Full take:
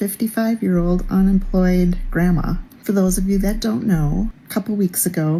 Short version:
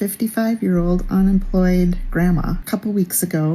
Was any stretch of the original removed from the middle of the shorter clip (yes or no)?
yes